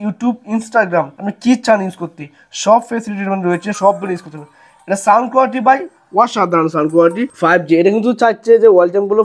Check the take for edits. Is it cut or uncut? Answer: uncut